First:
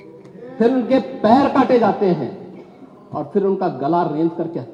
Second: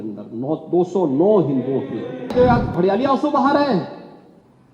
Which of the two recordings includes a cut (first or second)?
second